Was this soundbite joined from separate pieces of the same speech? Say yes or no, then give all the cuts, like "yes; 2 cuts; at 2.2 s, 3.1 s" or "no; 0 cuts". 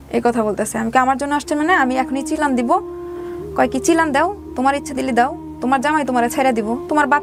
no; 0 cuts